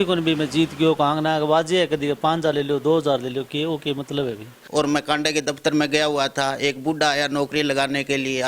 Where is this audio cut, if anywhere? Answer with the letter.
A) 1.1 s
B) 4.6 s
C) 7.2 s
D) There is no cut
B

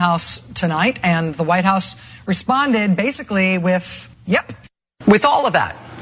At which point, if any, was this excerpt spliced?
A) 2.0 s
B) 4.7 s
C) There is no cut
B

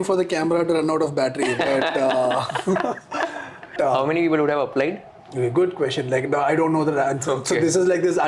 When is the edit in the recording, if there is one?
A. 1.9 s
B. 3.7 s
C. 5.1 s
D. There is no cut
B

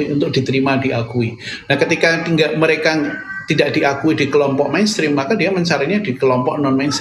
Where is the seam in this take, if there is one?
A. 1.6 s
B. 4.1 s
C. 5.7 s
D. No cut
D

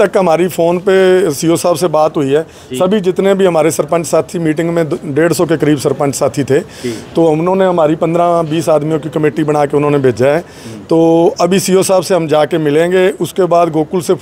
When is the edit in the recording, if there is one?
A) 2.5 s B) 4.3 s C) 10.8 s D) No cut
D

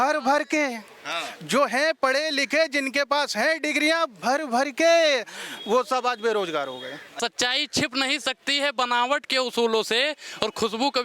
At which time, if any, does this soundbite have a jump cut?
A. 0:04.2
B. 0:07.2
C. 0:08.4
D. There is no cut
B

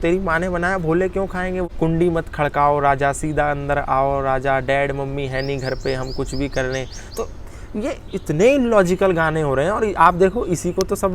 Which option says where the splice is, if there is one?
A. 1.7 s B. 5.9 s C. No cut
A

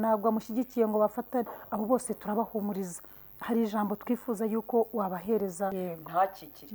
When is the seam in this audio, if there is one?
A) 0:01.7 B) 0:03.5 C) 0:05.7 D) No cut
C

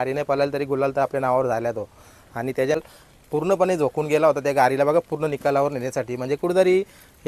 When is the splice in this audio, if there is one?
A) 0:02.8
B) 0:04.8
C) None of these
A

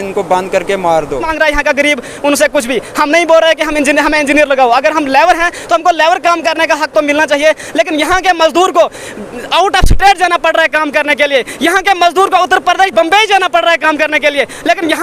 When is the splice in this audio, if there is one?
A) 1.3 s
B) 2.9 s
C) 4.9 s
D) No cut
A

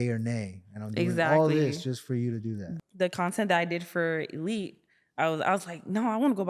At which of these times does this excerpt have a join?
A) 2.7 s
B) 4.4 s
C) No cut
A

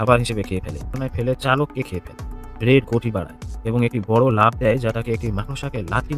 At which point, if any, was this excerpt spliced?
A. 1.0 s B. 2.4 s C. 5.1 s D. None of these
A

